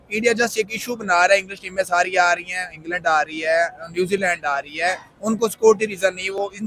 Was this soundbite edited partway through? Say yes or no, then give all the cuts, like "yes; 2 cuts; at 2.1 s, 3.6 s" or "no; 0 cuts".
no; 0 cuts